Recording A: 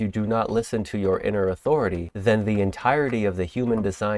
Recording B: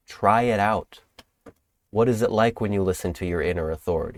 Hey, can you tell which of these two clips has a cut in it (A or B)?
A